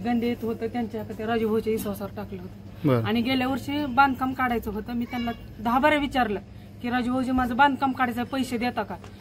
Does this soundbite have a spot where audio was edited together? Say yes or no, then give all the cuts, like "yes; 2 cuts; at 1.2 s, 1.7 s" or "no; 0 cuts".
no; 0 cuts